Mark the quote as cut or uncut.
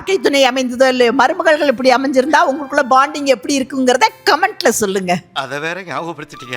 uncut